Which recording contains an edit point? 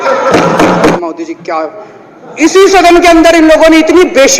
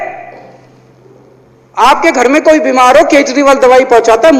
first; 1 cut; at 0.9 s

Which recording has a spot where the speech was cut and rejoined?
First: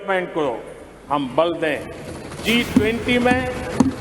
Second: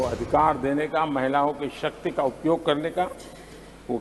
first; 1 cut; at 2.4 s

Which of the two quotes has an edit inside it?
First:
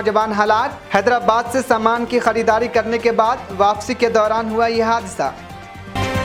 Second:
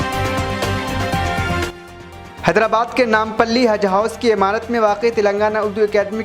second; 1 cut; at 1.7 s

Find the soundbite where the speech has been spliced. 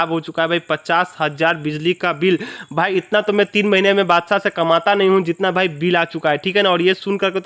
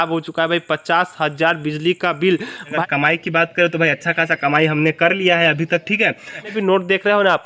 second; 2 cuts; at 2.8 s, 6.5 s

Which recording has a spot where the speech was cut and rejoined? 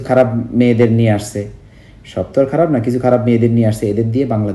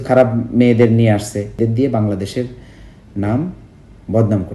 second; 1 cut; at 1.6 s

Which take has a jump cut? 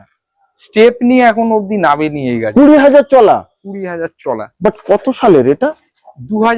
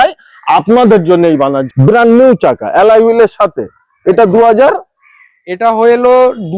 second; 1 cut; at 1.6 s

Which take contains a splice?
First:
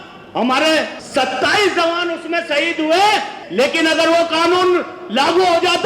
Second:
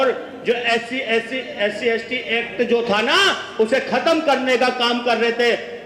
first; 2 cuts; at 1.0 s, 3.4 s

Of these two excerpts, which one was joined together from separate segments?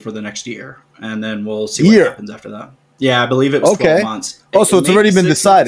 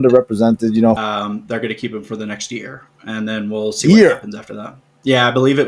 second; 1 cut; at 1.0 s

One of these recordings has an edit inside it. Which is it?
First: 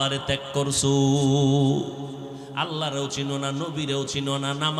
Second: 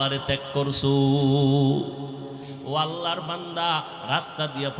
second; 1 cut; at 2.5 s

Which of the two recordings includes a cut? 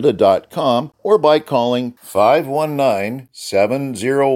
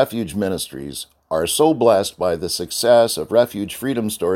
first; 1 cut; at 0.9 s

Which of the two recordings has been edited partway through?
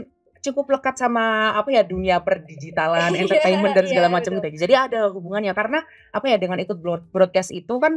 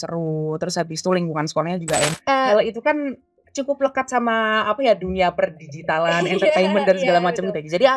second; 1 cut; at 2.2 s

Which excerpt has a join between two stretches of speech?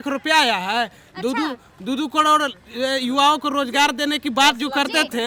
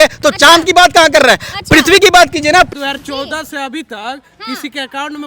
second; 1 cut; at 2.7 s

